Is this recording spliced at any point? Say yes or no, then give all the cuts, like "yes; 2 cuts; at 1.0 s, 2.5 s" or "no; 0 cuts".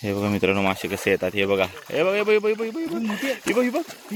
no; 0 cuts